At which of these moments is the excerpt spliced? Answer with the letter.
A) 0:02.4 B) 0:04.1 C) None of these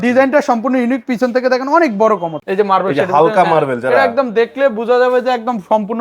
A